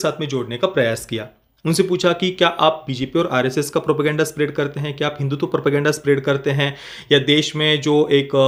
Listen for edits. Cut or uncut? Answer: uncut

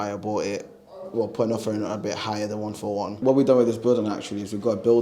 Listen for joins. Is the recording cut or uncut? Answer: cut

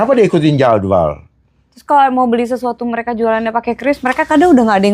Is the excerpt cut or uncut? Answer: uncut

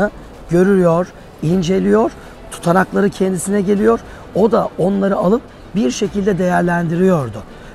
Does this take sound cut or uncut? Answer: uncut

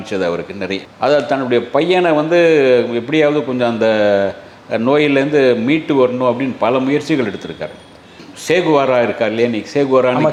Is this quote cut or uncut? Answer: uncut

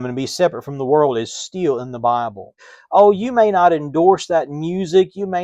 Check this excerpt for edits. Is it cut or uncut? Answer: cut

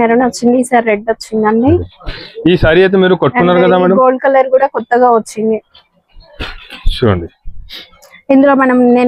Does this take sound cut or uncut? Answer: uncut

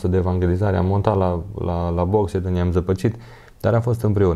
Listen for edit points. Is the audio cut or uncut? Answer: uncut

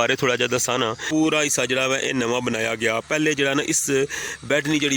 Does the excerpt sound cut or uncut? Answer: cut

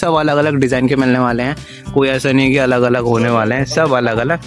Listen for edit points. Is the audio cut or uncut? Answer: uncut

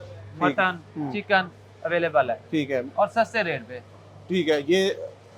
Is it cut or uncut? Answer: uncut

